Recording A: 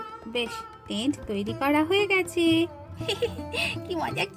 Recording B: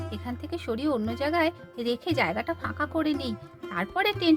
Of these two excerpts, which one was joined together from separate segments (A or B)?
A